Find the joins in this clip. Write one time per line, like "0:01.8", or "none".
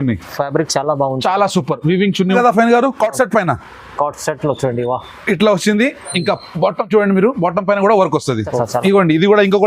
0:02.4
0:08.6